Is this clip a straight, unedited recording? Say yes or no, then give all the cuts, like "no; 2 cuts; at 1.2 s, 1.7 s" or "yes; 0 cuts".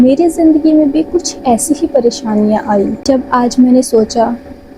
no; 1 cut; at 3.1 s